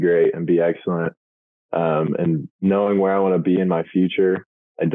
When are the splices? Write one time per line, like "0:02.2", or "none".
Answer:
none